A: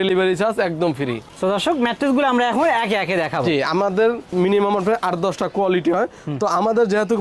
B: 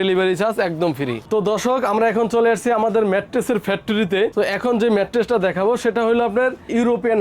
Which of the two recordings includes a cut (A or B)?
B